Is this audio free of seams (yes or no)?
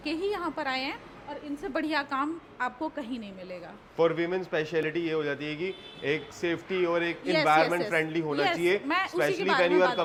yes